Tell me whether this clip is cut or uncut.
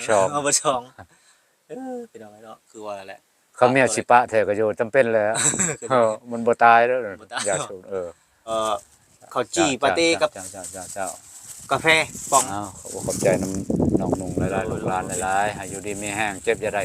cut